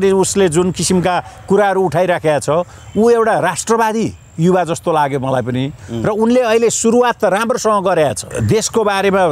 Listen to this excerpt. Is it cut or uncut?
cut